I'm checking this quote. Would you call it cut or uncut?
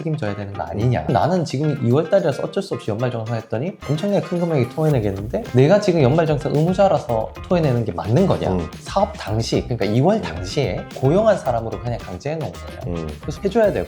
cut